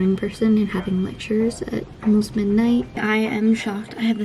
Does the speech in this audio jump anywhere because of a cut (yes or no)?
yes